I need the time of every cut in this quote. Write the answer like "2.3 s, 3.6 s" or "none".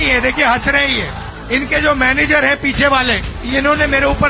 none